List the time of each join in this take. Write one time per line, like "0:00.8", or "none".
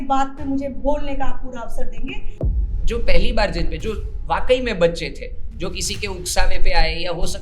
0:02.5

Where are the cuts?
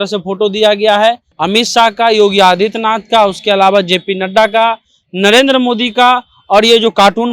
0:01.3

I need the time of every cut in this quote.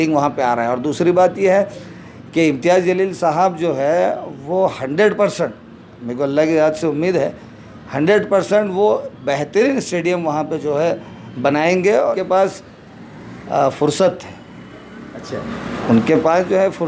0:12.1

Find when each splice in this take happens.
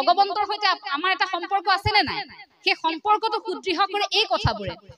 none

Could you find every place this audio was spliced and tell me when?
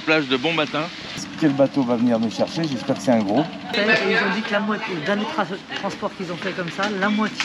0:01.3
0:03.7

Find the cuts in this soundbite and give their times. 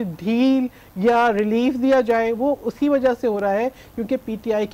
none

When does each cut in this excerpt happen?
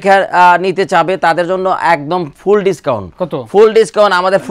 none

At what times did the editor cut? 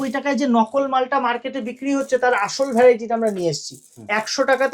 none

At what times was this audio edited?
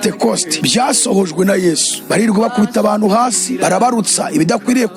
none

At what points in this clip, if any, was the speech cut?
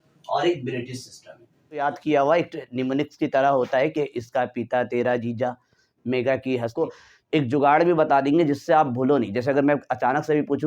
0:01.8
0:06.7

